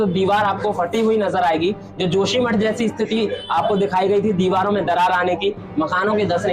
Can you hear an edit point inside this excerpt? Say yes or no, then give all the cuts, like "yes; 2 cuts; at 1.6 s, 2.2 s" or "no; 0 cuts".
no; 0 cuts